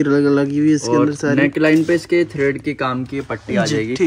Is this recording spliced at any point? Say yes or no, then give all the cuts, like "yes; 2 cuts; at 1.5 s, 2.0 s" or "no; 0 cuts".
no; 0 cuts